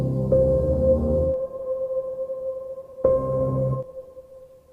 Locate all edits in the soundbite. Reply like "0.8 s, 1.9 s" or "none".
1.3 s